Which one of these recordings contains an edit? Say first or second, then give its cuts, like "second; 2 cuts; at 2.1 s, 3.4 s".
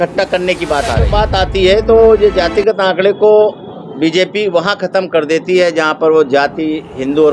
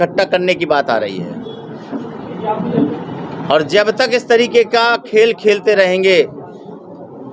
first; 1 cut; at 1.1 s